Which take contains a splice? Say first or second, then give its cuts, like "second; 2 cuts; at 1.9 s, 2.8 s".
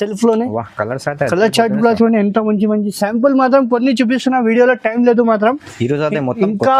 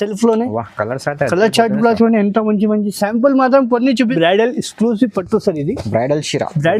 second; 1 cut; at 4.1 s